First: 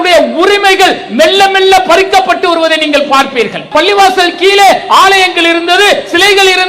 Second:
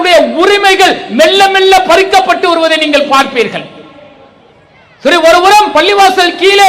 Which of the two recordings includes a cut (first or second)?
first